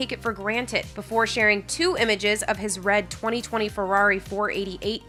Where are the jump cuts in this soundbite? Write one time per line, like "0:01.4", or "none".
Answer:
none